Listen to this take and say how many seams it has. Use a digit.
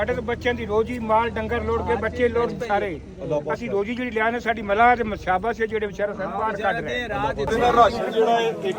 1